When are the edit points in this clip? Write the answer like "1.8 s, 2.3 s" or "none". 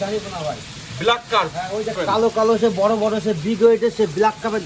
2.0 s

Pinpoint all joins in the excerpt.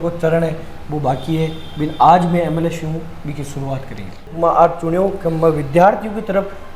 4.2 s

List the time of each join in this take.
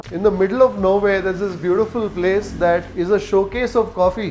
2.9 s

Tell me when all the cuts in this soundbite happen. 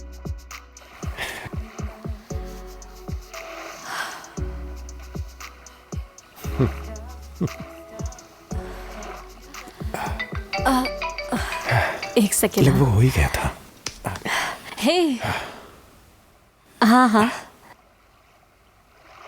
1.5 s

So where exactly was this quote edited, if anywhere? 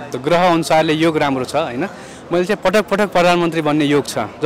none

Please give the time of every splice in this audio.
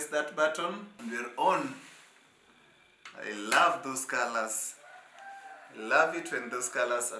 0.9 s

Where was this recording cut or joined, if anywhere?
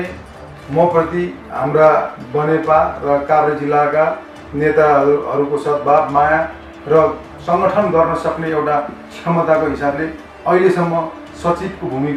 none

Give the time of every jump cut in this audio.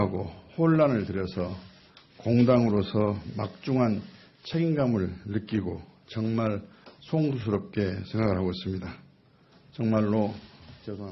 none

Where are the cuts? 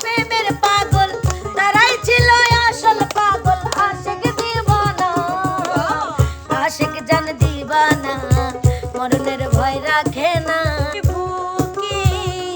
11.0 s

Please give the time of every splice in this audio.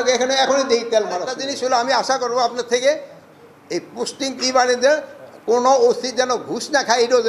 1.9 s

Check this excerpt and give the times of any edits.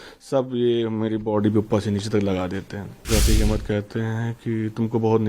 3.1 s

